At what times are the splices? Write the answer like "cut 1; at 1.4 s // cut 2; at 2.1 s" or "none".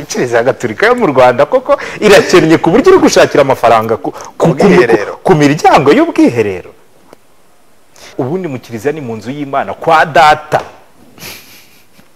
cut 1; at 8.1 s